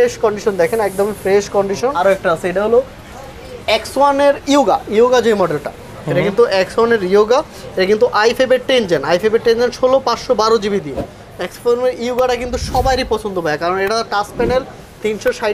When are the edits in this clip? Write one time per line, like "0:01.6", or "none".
0:02.0